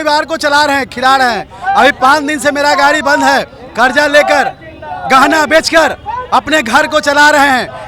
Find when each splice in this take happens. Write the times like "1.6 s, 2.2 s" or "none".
none